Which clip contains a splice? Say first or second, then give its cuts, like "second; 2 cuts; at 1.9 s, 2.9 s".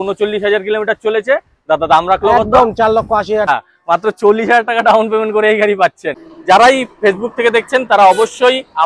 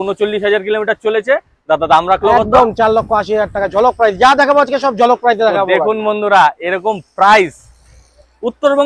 first; 2 cuts; at 3.5 s, 6.3 s